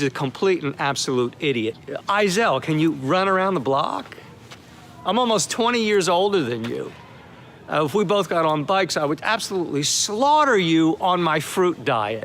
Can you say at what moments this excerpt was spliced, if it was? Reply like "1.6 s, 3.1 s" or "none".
1.8 s